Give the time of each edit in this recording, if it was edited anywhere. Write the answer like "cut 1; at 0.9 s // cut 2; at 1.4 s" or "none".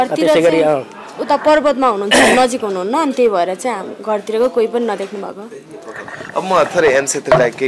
none